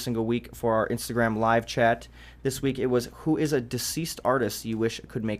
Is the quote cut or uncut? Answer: uncut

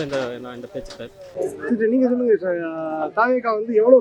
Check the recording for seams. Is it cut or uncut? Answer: uncut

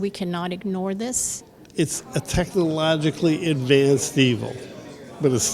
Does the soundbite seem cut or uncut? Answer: cut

